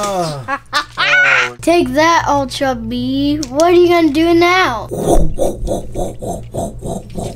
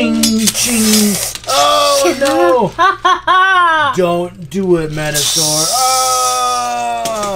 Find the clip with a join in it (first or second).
first